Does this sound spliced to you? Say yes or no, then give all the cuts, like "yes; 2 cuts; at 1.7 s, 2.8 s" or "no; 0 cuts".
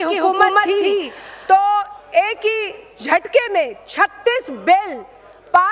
no; 0 cuts